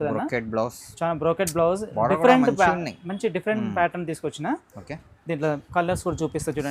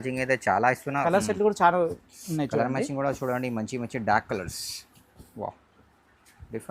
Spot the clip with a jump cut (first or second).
second